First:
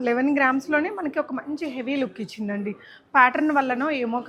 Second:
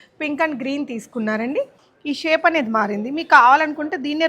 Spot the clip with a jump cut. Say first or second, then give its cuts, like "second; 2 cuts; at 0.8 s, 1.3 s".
second; 1 cut; at 1.9 s